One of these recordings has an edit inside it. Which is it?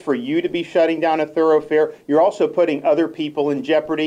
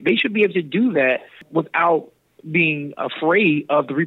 second; 1 cut; at 1.4 s

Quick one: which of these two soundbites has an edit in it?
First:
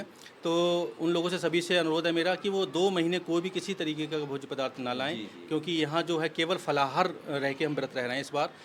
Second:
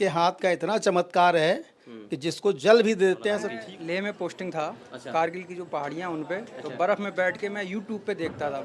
second; 1 cut; at 3.5 s

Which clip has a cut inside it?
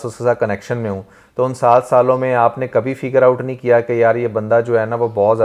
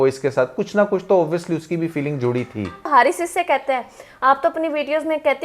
second; 1 cut; at 2.9 s

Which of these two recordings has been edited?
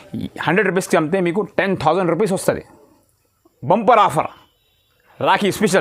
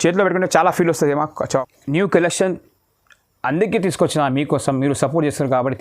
second; 1 cut; at 1.6 s

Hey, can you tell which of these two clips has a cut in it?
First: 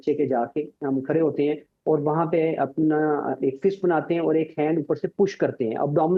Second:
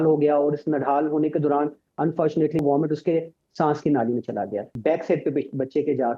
second; 2 cuts; at 2.6 s, 4.7 s

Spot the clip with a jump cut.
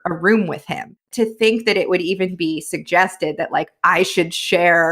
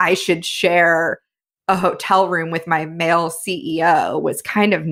first; 1 cut; at 1.1 s

